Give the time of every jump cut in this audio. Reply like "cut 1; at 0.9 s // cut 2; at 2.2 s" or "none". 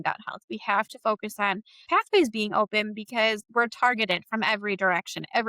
cut 1; at 1.8 s // cut 2; at 3.4 s